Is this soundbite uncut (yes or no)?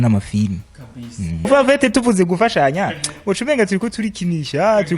no